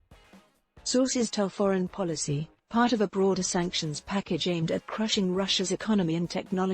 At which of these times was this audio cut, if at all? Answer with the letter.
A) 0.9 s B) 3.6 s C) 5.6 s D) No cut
A